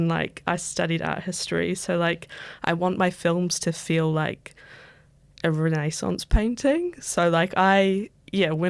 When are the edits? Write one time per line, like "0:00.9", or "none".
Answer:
none

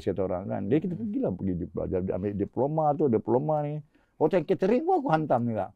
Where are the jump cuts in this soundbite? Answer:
none

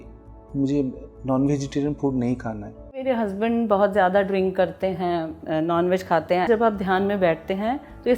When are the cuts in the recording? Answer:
0:03.0
0:06.5

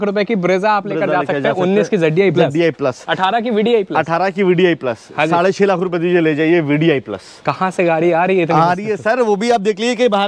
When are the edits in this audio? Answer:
none

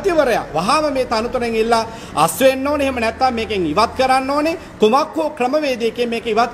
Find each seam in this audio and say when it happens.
none

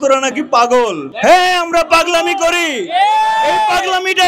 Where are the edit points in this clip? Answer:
0:01.0

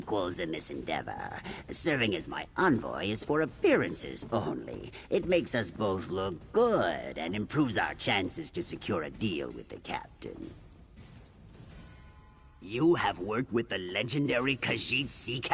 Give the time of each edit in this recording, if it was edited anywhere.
0:10.5
0:12.6

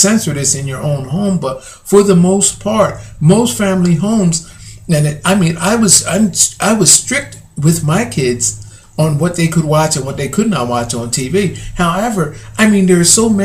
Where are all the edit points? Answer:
0:02.4

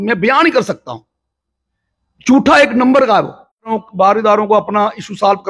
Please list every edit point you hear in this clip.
0:03.8

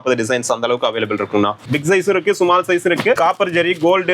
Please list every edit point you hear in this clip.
0:01.6
0:03.2

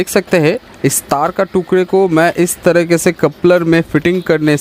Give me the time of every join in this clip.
none

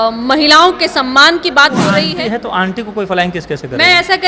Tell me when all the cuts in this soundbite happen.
0:02.1

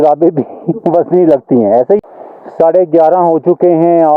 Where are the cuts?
0:02.0

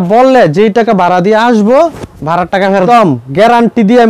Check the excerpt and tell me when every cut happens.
0:02.9

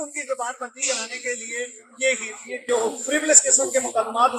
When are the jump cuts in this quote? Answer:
none

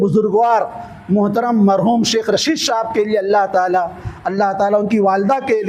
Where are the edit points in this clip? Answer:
none

